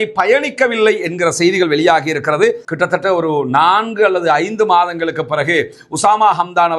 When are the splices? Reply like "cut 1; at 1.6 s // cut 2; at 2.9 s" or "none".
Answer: cut 1; at 2.6 s

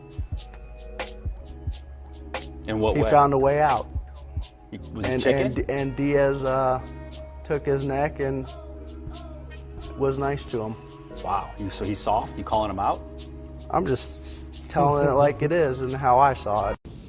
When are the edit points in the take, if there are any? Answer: cut 1; at 8.5 s

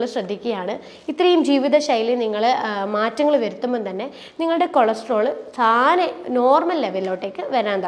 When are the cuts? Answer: none

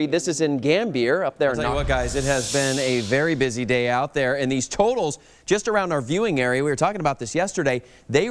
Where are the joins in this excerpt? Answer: cut 1; at 1.7 s

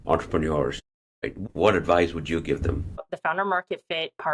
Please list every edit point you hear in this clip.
cut 1; at 1.1 s // cut 2; at 3.1 s

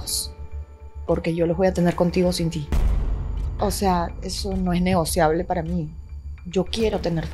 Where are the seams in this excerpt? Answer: cut 1; at 3.3 s

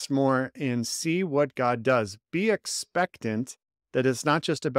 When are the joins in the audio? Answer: none

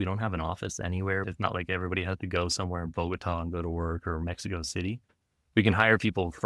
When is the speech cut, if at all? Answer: none

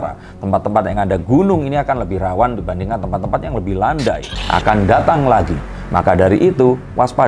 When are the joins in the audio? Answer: cut 1; at 4.4 s

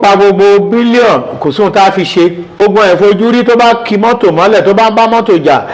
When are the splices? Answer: cut 1; at 2.6 s

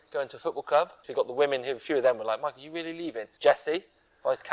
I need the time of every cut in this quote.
cut 1; at 1.1 s // cut 2; at 3.2 s

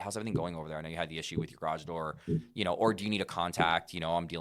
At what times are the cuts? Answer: none

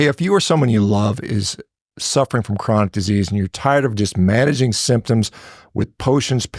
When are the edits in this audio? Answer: none

